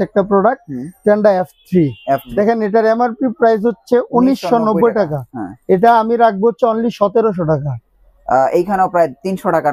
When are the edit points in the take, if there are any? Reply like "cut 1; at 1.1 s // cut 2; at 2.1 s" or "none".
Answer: cut 1; at 2.3 s

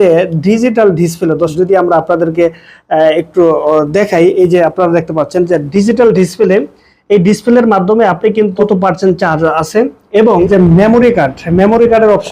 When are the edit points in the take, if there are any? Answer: cut 1; at 1.5 s // cut 2; at 8.6 s // cut 3; at 10.5 s

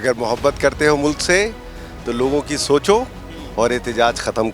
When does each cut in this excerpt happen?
none

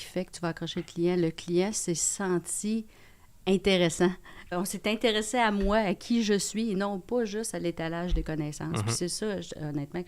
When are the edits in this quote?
cut 1; at 4.5 s

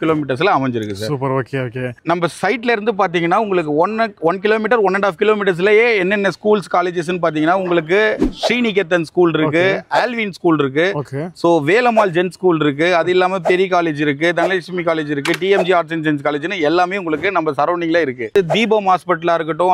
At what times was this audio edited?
cut 1; at 1.9 s // cut 2; at 18.3 s

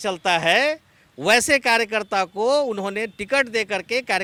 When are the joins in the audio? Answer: none

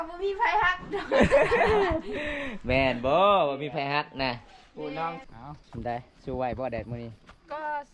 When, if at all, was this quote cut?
cut 1; at 5.3 s

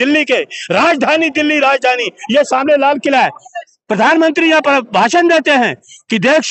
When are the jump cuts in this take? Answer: none

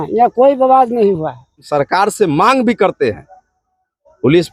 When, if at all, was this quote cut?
cut 1; at 1.7 s

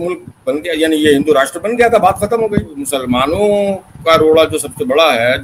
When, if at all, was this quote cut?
cut 1; at 2.8 s

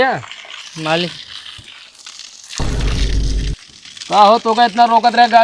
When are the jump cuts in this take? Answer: cut 1; at 2.5 s // cut 2; at 3.6 s

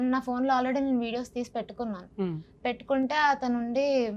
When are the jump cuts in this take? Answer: none

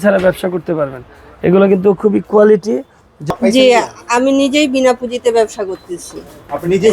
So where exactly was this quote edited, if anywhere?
cut 1; at 3.2 s

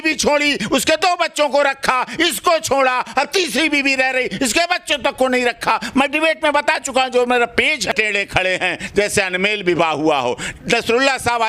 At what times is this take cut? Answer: cut 1; at 8.2 s

